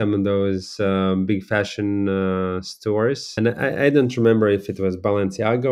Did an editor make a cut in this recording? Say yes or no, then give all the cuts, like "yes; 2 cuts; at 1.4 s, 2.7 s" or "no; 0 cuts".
yes; 1 cut; at 3.3 s